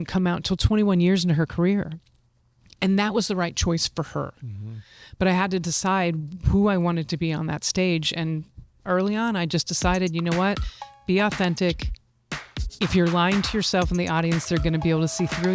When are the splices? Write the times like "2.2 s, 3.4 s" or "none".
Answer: none

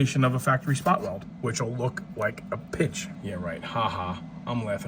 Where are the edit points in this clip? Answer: 3.1 s

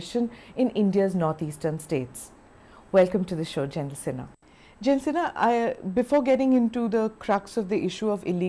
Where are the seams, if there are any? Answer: 6.7 s

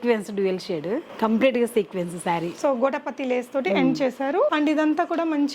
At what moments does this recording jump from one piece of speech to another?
1.1 s, 4.5 s

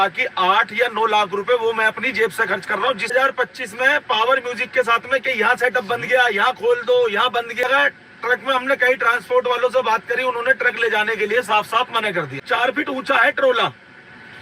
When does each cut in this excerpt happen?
3.1 s, 7.6 s, 12.4 s

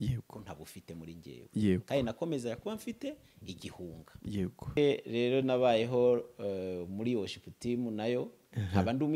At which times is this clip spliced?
4.8 s

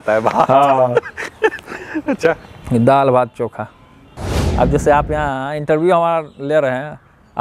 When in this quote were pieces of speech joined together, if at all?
4.0 s

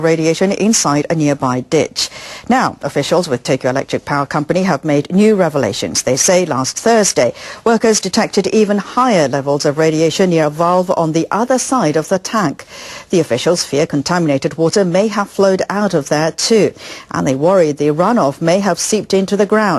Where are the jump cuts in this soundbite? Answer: 1.1 s

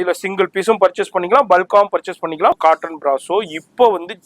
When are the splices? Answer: 2.6 s

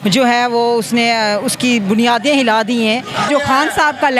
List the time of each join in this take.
3.3 s

